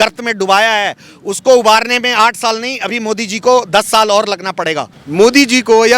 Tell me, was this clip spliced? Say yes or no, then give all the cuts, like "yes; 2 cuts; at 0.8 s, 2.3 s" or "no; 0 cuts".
yes; 1 cut; at 5.0 s